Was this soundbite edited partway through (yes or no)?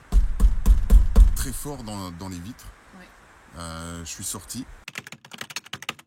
yes